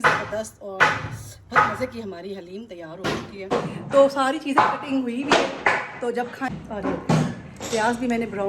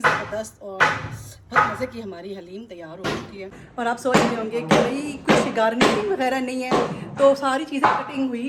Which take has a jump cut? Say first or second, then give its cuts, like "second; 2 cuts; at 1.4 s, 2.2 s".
first; 2 cuts; at 3.5 s, 6.5 s